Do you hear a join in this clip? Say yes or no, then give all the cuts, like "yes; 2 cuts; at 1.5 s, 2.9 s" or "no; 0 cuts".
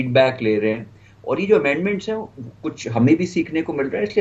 no; 0 cuts